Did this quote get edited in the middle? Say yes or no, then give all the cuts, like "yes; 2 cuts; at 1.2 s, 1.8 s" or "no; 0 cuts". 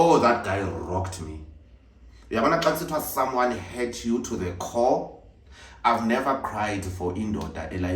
no; 0 cuts